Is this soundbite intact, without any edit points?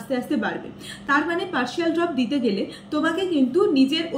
yes; 0 cuts

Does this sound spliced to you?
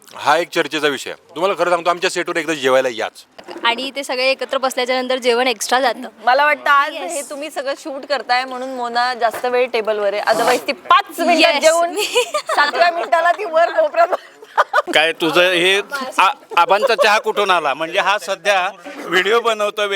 yes; 2 cuts; at 3.5 s, 14.9 s

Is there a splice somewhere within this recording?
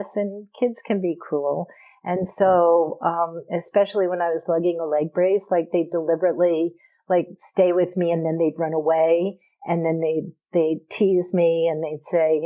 no; 0 cuts

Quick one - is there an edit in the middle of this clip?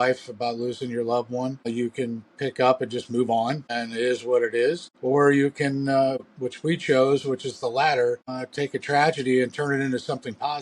yes; 5 cuts; at 1.7 s, 3.7 s, 4.9 s, 6.2 s, 8.4 s

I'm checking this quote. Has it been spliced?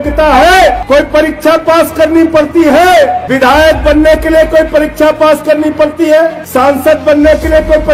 yes; 3 cuts; at 0.8 s, 3.2 s, 6.4 s

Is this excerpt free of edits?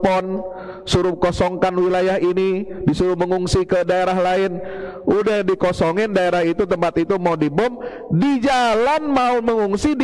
yes; 0 cuts

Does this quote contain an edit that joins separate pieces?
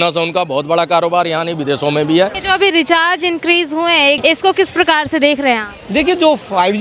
yes; 2 cuts; at 2.4 s, 4.2 s

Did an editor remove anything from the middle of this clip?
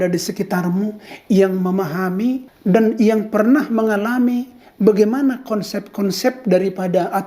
yes; 1 cut; at 2.5 s

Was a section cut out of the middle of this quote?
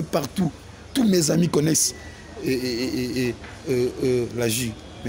no; 0 cuts

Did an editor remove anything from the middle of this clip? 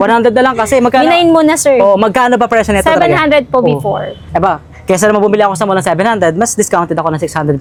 no; 0 cuts

